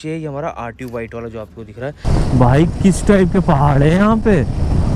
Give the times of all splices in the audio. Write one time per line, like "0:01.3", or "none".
0:02.0